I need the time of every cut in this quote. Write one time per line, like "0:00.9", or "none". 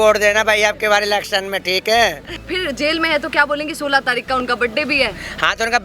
0:02.3